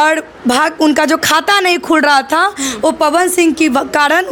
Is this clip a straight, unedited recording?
yes; 0 cuts

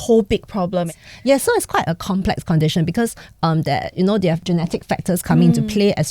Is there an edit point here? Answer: yes; 1 cut; at 4.4 s

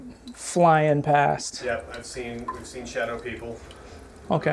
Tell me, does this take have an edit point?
no; 0 cuts

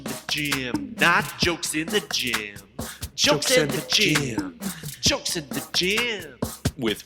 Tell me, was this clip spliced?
no; 0 cuts

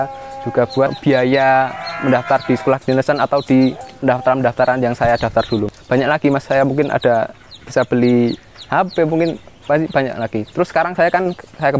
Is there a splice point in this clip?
yes; 3 cuts; at 1.0 s, 3.9 s, 5.8 s

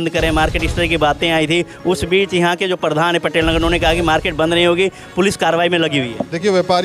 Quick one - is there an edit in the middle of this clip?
no; 0 cuts

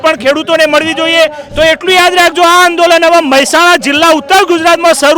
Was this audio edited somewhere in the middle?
yes; 1 cut; at 1.4 s

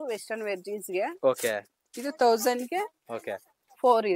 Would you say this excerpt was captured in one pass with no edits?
yes; 0 cuts

